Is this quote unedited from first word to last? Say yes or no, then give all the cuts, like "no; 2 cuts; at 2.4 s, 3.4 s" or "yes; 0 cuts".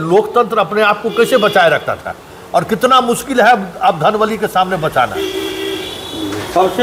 yes; 0 cuts